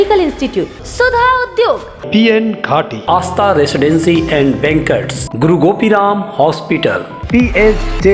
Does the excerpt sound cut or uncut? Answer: uncut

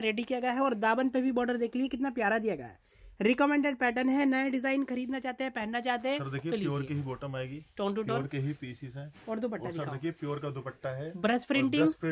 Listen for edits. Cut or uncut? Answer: uncut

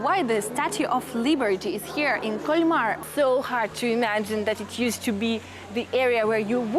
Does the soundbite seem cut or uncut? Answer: cut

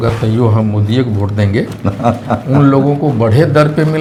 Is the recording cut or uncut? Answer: uncut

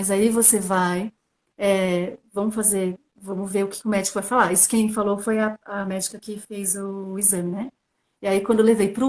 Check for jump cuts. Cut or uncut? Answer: uncut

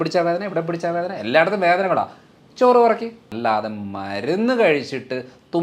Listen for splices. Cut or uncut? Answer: cut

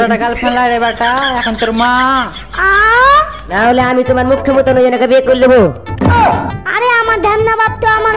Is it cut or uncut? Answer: cut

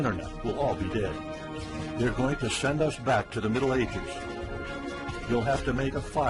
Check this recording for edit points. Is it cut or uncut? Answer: uncut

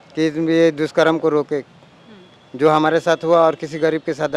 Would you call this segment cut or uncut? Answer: uncut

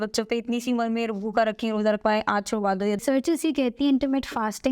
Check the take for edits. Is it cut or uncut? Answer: cut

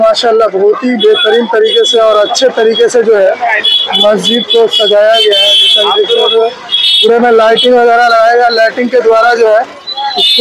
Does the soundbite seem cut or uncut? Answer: uncut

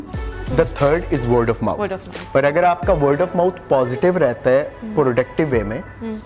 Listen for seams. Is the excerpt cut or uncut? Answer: uncut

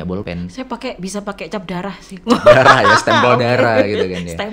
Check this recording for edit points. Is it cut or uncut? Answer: uncut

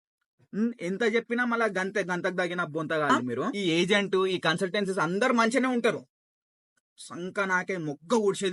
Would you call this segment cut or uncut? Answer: cut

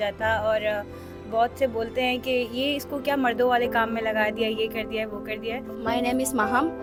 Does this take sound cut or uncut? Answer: uncut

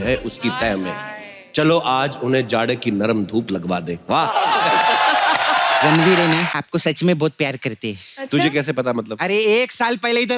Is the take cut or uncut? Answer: cut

